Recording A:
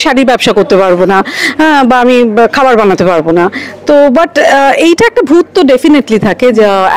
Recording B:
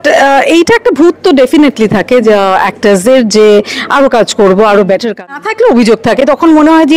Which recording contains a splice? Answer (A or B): B